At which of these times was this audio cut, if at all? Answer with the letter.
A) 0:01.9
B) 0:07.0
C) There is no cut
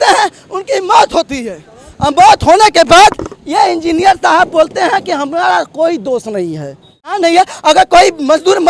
B